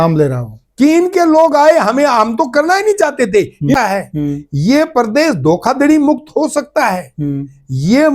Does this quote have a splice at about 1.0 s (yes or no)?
no